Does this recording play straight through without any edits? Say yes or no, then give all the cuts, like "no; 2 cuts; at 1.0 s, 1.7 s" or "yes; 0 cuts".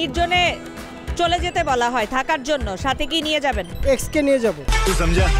yes; 0 cuts